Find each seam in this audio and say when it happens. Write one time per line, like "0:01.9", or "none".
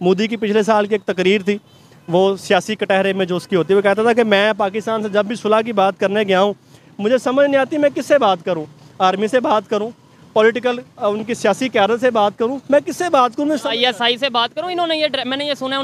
none